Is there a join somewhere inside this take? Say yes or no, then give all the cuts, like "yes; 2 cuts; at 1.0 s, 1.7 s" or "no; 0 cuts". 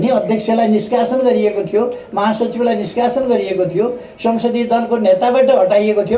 no; 0 cuts